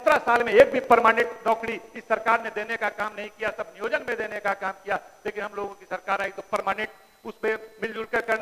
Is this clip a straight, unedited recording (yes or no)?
yes